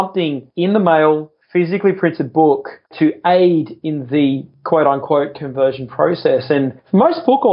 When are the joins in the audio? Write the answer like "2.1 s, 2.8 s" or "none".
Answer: 2.9 s